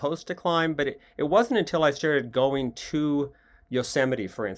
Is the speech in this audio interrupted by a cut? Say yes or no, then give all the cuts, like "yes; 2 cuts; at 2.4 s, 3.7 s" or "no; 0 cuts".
no; 0 cuts